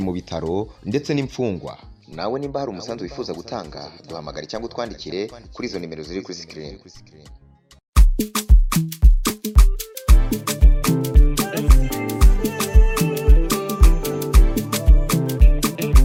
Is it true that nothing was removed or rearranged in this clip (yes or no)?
yes